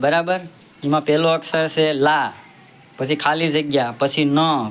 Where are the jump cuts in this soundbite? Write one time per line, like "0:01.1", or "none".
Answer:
none